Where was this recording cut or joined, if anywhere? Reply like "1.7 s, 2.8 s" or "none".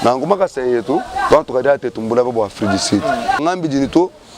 3.4 s